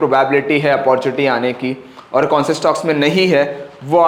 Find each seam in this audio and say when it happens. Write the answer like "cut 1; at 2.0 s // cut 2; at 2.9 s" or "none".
none